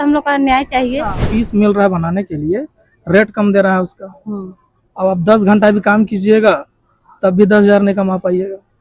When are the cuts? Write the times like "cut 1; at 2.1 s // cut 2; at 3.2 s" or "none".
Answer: cut 1; at 1.2 s